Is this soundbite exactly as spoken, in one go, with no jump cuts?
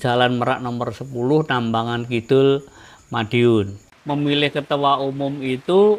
no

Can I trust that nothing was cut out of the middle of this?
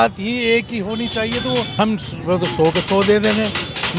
no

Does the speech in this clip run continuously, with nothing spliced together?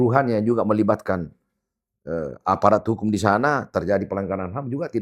yes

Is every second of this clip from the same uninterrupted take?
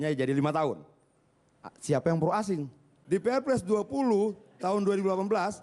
no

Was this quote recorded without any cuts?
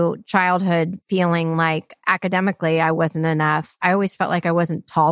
no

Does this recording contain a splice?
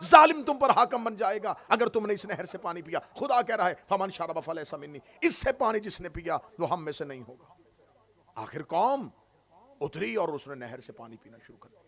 no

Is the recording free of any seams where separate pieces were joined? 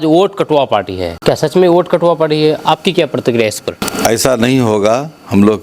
no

